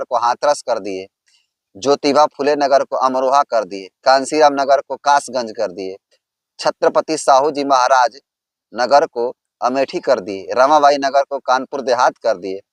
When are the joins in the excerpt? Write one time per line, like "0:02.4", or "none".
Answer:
none